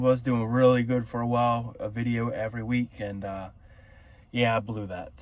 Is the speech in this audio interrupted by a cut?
no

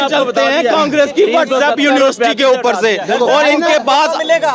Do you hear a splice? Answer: no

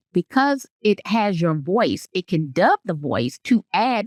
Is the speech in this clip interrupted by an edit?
no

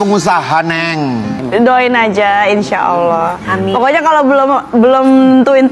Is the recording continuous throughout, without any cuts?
no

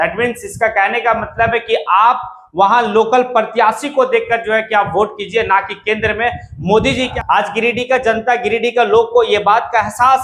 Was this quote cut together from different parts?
yes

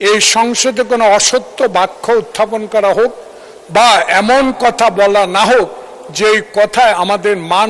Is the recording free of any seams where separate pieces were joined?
yes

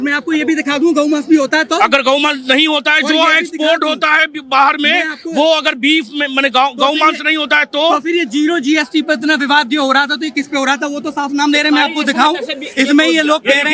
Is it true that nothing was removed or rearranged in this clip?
yes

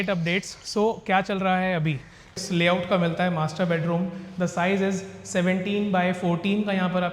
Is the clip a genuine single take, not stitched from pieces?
no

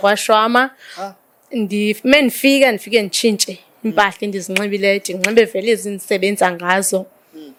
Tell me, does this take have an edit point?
no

